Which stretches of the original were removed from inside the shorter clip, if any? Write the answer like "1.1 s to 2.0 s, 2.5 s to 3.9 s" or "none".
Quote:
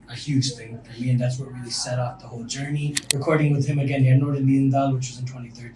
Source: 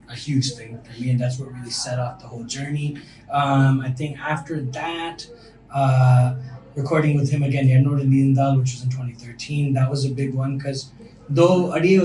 3.0 s to 6.7 s

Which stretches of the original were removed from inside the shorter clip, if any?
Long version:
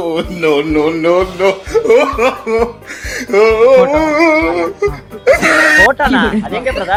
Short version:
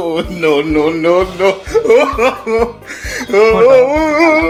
none

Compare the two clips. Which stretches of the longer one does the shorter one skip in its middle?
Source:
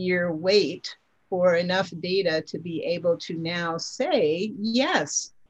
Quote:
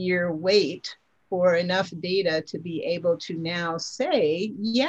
none

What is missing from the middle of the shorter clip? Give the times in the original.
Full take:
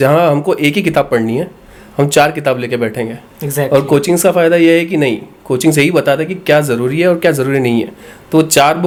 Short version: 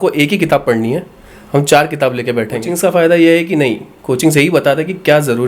3.2 s to 4.1 s

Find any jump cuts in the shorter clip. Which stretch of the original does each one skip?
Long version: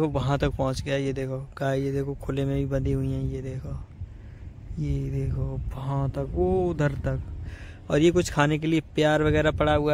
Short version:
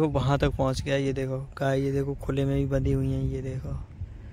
none

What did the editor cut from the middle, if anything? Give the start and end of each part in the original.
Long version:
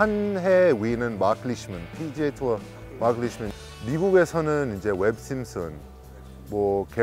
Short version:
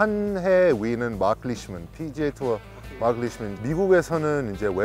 3.5 s to 3.7 s

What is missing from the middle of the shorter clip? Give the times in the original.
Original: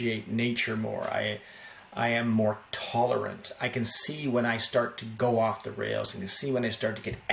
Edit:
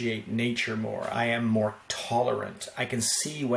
1.1 s to 1.9 s

